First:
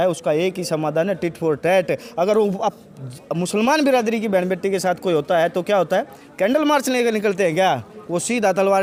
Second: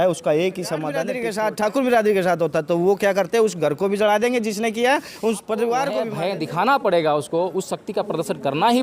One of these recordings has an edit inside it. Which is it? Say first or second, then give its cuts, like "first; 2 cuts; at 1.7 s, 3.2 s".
second; 2 cuts; at 1.1 s, 6.1 s